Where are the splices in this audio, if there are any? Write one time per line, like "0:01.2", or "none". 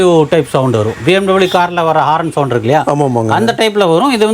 none